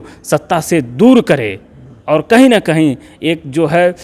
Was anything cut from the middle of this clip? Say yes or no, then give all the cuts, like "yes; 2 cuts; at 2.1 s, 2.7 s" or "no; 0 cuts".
no; 0 cuts